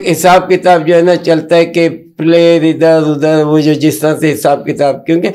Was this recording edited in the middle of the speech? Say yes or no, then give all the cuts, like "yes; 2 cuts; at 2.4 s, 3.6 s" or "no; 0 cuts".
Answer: no; 0 cuts